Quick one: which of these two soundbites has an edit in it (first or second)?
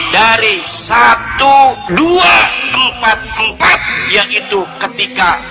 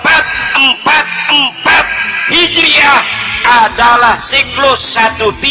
second